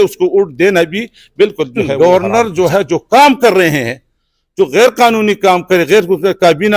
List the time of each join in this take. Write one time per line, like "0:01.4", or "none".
0:01.9